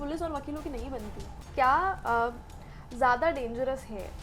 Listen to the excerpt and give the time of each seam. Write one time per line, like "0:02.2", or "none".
0:01.5